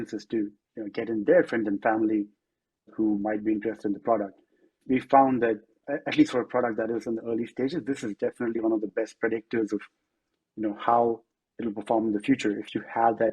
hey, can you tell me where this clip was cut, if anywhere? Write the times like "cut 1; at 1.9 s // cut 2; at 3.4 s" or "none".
cut 1; at 2.9 s // cut 2; at 4.8 s // cut 3; at 5.8 s